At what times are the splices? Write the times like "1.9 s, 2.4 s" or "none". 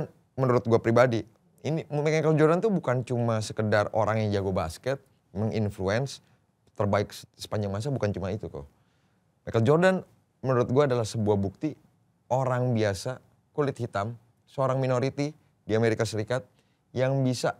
none